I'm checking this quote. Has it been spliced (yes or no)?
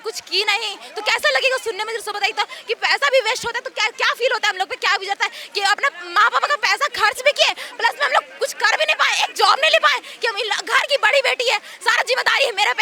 no